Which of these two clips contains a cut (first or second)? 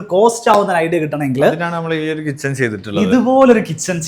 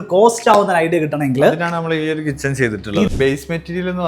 second